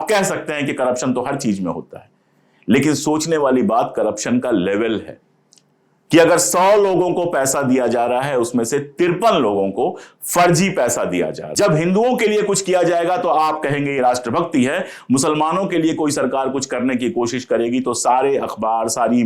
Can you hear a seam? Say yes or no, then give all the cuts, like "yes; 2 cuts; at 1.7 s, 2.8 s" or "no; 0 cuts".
yes; 1 cut; at 11.4 s